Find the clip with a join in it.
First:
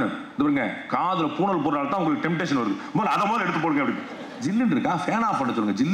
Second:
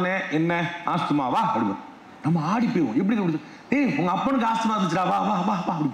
first; 1 cut; at 4.3 s

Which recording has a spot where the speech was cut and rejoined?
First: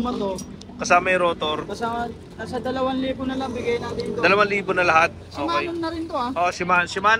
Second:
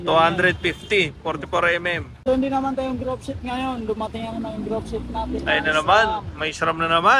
second; 1 cut; at 2.3 s

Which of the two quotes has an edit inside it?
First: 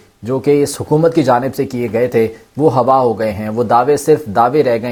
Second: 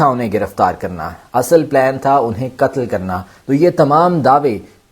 second; 1 cut; at 3.3 s

